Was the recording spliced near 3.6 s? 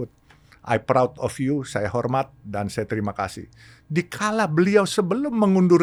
no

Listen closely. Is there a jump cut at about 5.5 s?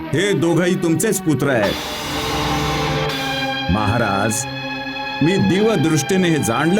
no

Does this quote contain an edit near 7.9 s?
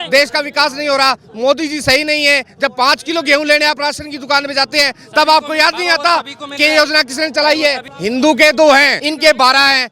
yes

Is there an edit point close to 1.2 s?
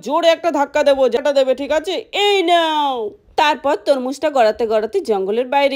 yes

